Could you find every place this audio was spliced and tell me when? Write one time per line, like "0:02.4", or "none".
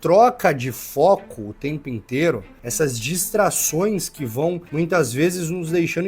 0:02.6
0:04.6